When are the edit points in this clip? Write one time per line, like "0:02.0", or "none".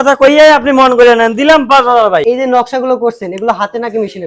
0:02.2